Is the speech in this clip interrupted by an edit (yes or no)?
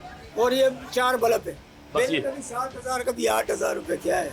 no